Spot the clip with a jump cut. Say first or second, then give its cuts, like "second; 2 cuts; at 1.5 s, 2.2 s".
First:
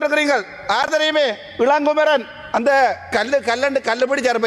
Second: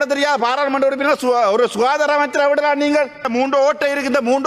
second; 1 cut; at 3.2 s